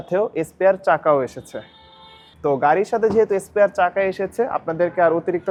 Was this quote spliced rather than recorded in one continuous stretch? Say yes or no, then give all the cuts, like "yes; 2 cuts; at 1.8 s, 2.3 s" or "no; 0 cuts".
no; 0 cuts